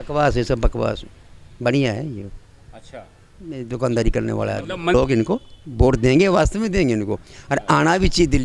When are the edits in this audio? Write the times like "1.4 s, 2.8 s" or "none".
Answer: 4.9 s